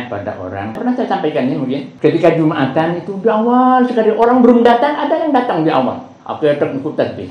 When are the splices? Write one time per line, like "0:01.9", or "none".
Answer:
0:00.8
0:01.9

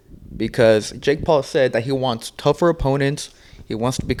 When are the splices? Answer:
none

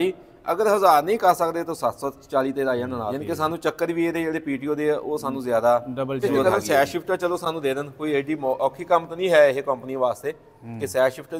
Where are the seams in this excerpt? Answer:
0:03.1
0:06.4

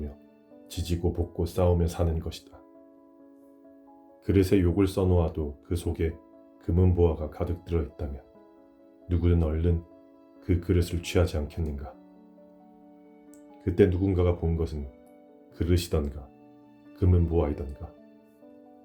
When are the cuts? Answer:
0:02.6
0:04.2
0:11.9
0:13.3
0:17.9

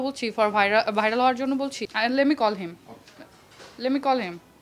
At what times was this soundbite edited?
0:01.8

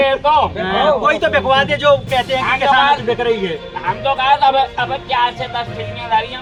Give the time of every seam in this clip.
none

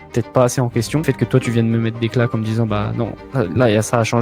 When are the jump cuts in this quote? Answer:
0:01.0

